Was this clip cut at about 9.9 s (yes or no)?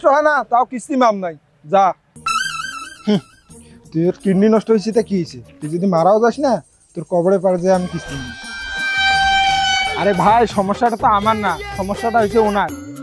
yes